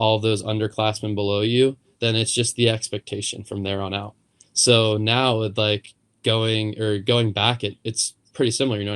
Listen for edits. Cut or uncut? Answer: uncut